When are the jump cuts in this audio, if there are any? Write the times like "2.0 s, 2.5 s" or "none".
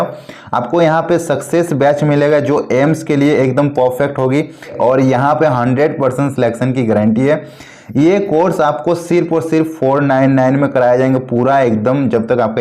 4.8 s